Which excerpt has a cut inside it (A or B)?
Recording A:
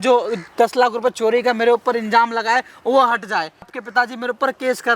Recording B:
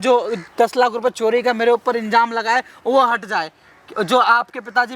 A